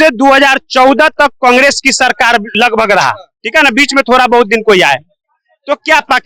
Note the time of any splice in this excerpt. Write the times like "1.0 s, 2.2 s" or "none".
none